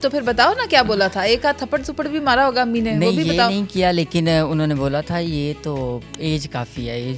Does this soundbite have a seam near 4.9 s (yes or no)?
no